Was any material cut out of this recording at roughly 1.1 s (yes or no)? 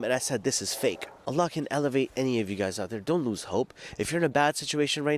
yes